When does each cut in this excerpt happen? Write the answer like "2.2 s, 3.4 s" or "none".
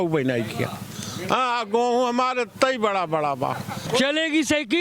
3.8 s